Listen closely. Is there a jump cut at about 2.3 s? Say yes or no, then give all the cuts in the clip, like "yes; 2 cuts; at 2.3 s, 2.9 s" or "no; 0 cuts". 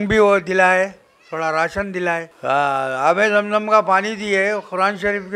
yes; 1 cut; at 2.3 s